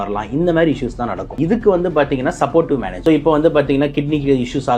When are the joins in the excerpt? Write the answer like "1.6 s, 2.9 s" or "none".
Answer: 1.2 s, 2.9 s